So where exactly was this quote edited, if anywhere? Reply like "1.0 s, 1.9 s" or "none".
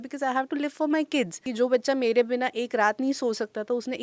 1.4 s